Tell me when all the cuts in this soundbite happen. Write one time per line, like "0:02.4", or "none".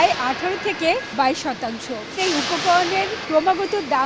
0:01.1
0:02.2
0:03.2